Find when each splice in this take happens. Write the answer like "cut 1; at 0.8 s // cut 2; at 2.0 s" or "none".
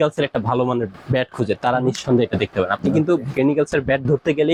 none